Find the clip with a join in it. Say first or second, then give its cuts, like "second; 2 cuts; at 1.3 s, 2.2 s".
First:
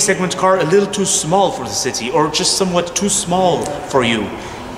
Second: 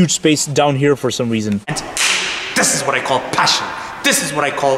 second; 1 cut; at 1.8 s